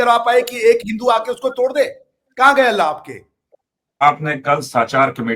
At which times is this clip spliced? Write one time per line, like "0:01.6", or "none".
0:04.0